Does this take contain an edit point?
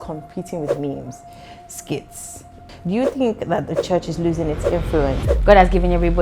yes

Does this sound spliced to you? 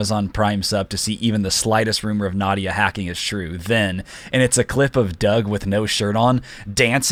no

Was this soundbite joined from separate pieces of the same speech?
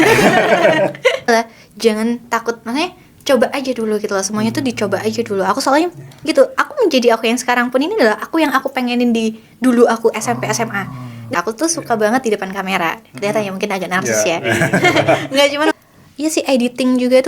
yes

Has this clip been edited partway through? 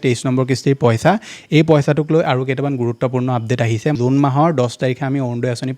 yes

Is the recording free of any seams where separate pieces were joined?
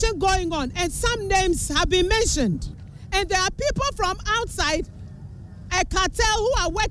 yes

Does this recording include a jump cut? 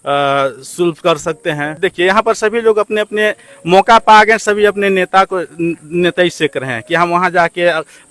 yes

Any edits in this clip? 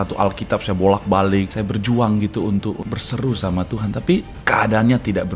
yes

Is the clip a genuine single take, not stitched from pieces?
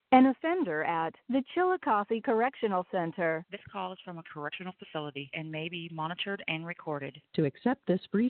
yes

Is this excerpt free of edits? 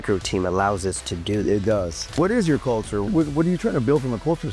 no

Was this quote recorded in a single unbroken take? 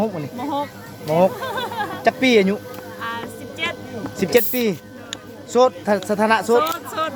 yes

